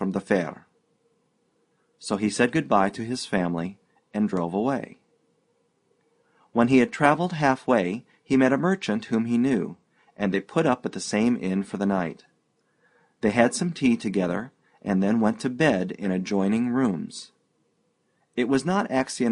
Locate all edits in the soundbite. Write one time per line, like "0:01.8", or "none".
0:11.4